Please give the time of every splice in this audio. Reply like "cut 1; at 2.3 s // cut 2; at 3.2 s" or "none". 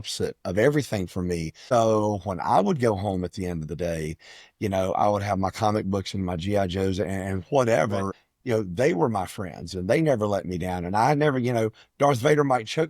cut 1; at 1.5 s // cut 2; at 8.2 s

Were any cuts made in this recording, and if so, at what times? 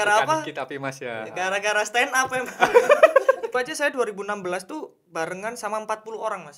cut 1; at 3.5 s

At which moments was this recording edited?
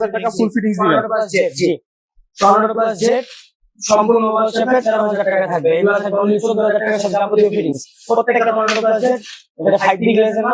none

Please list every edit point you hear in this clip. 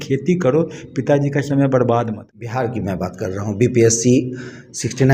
cut 1; at 2.5 s

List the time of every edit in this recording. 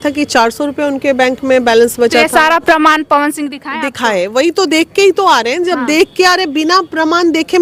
none

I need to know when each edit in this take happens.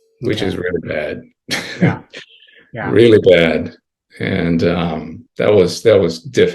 cut 1; at 5.2 s

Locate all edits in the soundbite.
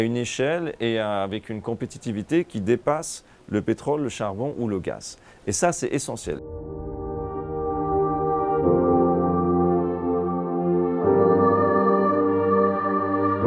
cut 1; at 6.4 s

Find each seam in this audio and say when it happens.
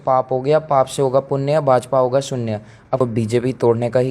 cut 1; at 3.0 s

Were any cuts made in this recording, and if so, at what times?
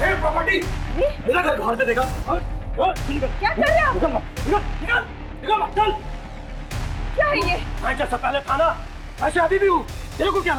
none

